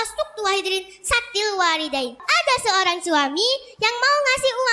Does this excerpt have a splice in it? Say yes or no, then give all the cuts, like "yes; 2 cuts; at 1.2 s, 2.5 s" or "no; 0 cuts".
yes; 1 cut; at 2.2 s